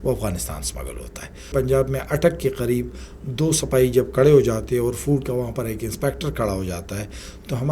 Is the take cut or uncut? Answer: cut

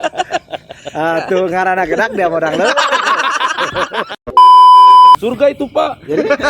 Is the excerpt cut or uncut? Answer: cut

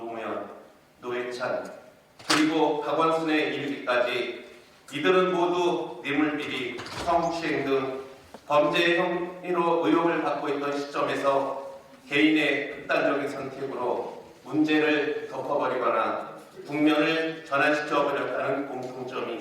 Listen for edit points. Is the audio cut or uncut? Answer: uncut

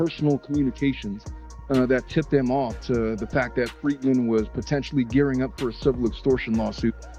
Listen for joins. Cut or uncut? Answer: uncut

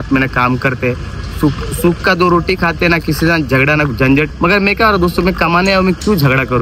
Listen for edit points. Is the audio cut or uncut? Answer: cut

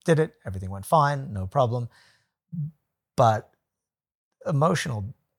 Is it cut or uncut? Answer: uncut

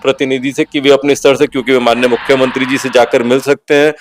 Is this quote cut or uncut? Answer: uncut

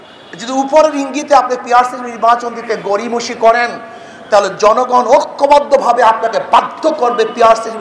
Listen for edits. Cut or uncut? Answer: uncut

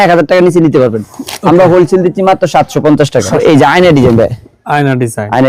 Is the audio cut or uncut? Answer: cut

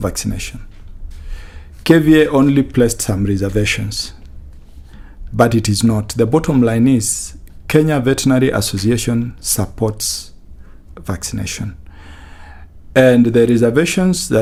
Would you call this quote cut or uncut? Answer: uncut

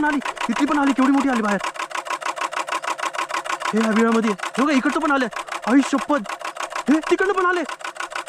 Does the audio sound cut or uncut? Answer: uncut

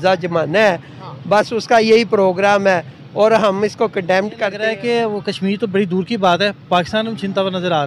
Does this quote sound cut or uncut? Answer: cut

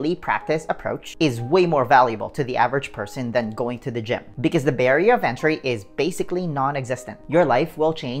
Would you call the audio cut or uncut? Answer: cut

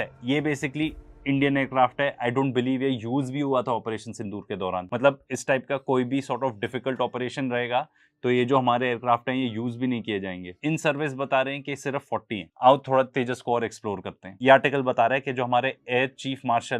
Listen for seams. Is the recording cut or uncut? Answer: uncut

